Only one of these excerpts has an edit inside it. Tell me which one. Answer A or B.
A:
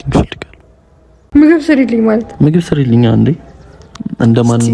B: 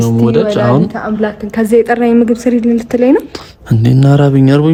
A